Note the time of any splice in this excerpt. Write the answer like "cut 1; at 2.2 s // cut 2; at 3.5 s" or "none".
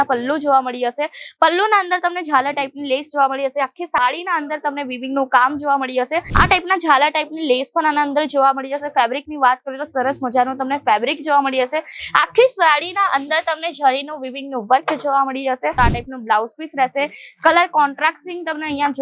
cut 1; at 6.3 s // cut 2; at 15.7 s